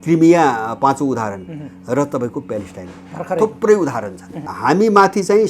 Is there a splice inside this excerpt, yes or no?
yes